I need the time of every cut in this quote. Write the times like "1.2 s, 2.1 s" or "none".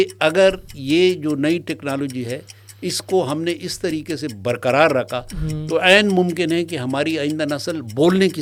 none